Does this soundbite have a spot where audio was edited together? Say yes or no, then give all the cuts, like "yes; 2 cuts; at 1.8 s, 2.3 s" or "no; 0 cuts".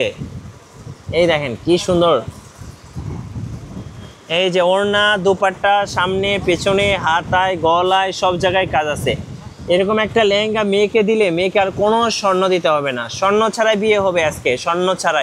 no; 0 cuts